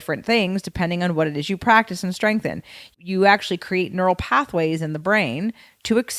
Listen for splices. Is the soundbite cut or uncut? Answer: cut